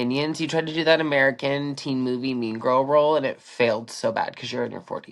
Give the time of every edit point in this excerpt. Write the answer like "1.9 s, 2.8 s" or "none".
none